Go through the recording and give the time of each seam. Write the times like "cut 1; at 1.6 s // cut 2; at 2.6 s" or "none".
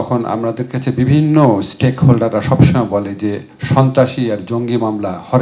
none